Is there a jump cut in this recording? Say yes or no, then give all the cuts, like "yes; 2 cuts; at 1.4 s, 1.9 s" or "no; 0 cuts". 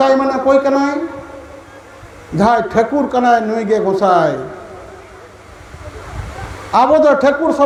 no; 0 cuts